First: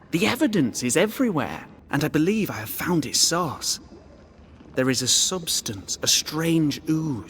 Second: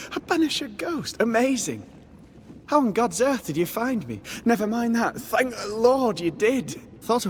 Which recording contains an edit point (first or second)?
first